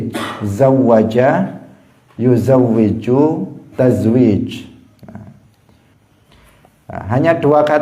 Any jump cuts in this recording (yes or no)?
yes